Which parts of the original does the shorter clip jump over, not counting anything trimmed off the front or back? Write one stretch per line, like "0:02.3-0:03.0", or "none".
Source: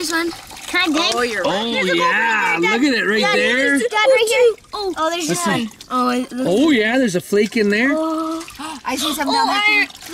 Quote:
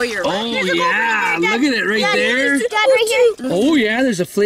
0:04.6-0:06.4